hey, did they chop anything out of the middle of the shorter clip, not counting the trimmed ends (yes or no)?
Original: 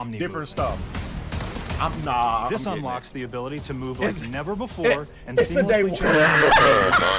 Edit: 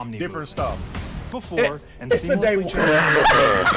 yes